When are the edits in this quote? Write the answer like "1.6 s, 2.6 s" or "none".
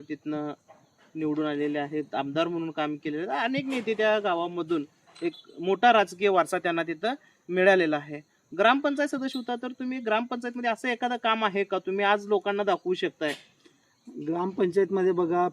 none